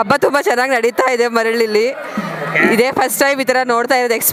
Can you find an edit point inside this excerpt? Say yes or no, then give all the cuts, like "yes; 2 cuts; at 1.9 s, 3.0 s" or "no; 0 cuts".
no; 0 cuts